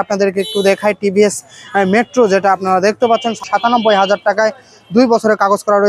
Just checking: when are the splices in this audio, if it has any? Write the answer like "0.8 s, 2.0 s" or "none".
3.5 s